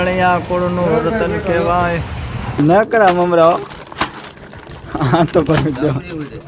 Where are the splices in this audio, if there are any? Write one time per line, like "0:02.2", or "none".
0:02.6